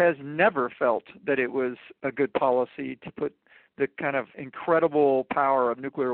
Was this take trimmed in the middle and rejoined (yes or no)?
yes